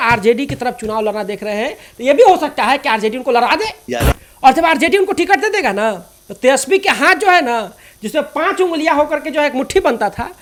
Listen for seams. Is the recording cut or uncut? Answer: uncut